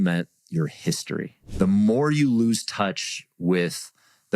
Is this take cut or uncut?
cut